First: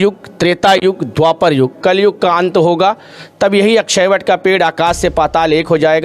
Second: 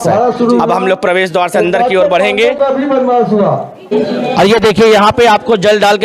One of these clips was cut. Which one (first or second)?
second